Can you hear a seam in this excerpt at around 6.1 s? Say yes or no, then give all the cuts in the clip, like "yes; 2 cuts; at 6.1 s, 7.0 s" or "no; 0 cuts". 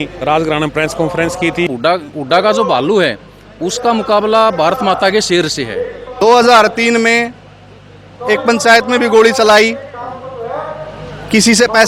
yes; 2 cuts; at 1.7 s, 6.1 s